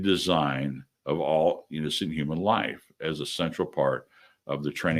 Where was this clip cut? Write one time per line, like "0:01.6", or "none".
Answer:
none